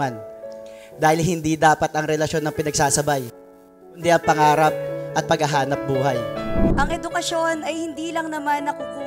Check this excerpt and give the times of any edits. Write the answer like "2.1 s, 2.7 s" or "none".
6.6 s